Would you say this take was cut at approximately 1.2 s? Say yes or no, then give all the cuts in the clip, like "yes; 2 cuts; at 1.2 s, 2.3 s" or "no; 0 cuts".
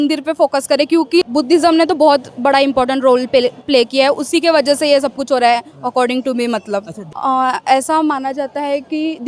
yes; 2 cuts; at 1.2 s, 7.0 s